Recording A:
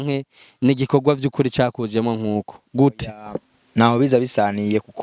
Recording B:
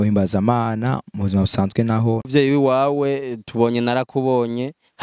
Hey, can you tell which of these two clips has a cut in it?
B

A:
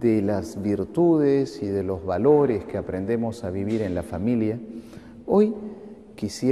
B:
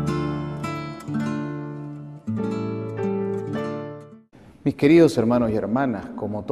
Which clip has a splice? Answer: B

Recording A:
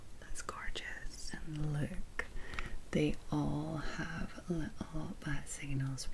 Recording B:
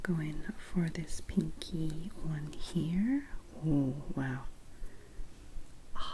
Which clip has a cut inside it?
A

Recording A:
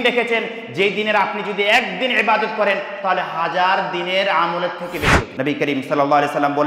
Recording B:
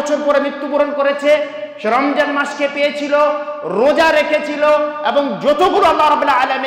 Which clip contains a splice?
A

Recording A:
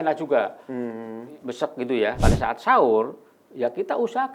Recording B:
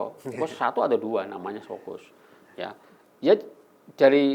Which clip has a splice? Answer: A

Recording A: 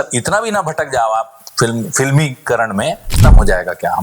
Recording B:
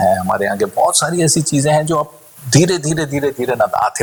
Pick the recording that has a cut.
A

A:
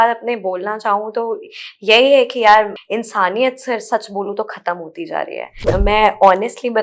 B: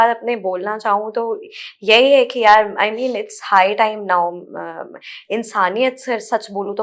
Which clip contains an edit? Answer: A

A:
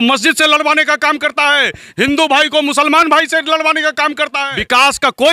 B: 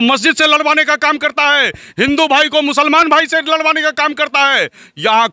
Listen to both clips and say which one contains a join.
A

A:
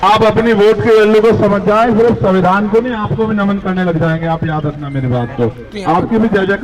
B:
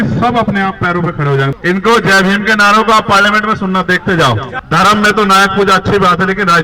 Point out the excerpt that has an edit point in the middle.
B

